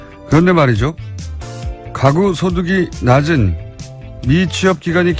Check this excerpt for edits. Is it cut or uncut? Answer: uncut